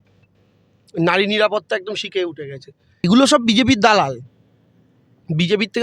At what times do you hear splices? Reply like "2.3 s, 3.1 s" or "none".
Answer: 3.1 s

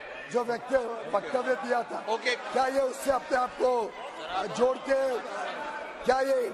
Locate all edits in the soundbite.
none

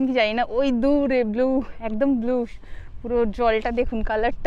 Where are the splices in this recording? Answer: none

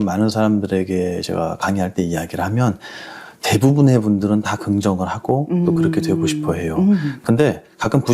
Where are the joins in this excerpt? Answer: none

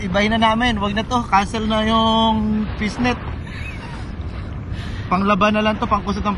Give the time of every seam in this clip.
none

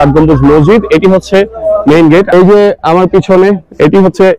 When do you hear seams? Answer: 2.3 s

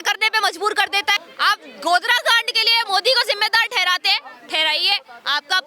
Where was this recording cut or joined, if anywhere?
1.3 s

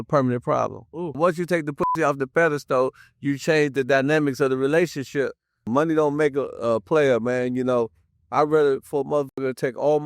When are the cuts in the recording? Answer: 1.2 s, 5.7 s

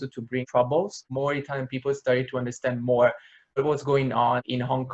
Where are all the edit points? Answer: 1.0 s, 3.6 s

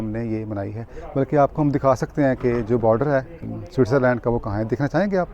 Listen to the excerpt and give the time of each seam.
3.4 s

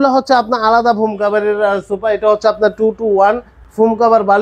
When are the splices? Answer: none

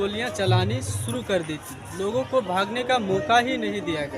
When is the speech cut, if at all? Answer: none

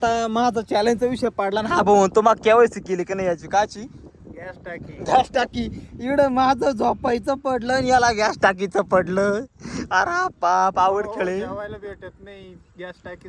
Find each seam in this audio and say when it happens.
none

